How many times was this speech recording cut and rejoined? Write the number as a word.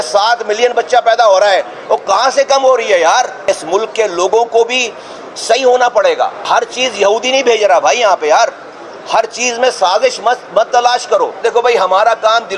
three